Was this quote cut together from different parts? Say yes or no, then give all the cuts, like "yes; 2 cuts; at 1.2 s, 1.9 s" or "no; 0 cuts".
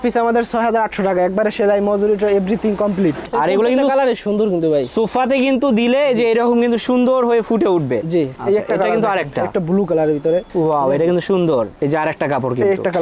yes; 3 cuts; at 3.2 s, 8.4 s, 11.7 s